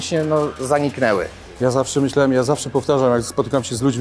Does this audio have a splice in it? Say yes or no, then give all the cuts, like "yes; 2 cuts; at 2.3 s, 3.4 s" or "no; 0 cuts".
yes; 1 cut; at 1.5 s